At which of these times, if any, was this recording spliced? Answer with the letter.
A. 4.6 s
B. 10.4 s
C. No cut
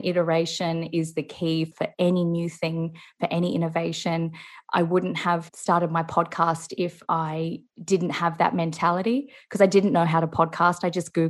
C